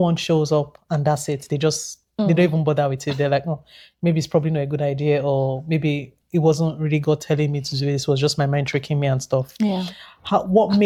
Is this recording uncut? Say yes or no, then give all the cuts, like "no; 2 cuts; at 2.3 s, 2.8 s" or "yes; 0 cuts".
yes; 0 cuts